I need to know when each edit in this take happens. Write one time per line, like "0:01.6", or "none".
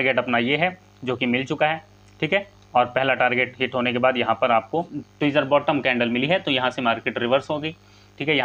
none

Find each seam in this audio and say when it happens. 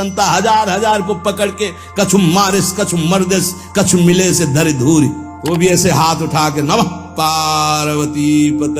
0:05.3

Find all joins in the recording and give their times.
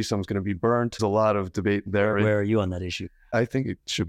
0:01.0

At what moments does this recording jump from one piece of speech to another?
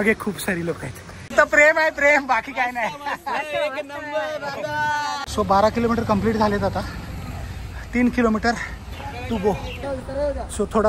0:01.3
0:05.2
0:09.8

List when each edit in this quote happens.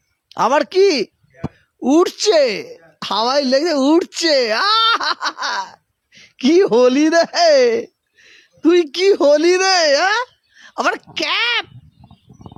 none

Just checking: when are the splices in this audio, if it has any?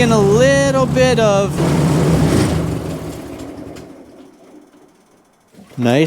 0:01.6
0:05.1

